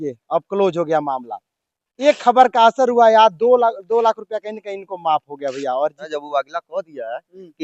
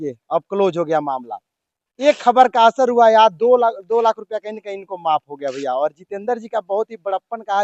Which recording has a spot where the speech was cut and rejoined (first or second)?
first